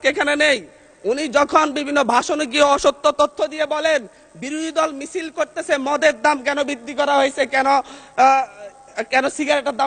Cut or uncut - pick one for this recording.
uncut